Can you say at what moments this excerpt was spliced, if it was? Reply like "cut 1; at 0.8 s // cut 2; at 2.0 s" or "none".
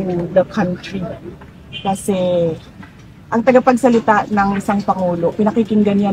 none